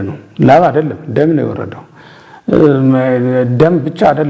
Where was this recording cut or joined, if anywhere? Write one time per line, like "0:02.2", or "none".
none